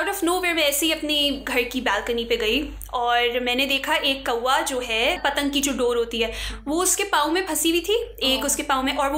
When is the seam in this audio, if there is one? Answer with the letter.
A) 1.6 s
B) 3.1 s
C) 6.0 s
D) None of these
D